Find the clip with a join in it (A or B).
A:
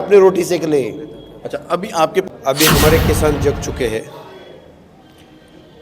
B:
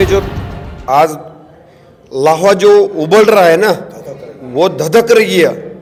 A